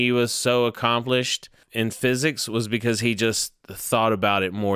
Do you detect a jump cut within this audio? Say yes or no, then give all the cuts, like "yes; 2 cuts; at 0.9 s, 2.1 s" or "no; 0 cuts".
yes; 1 cut; at 1.6 s